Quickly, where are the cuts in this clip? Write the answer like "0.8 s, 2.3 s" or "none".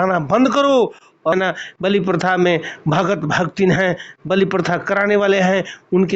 1.3 s